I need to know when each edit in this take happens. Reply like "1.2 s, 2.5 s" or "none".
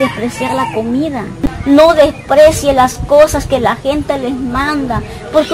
1.3 s